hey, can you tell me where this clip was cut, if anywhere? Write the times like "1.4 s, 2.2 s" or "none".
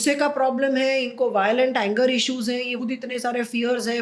2.7 s